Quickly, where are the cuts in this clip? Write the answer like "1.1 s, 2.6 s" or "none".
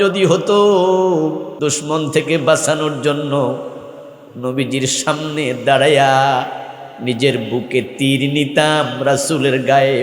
1.5 s